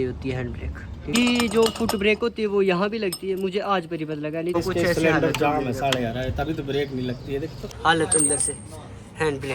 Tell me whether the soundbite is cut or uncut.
cut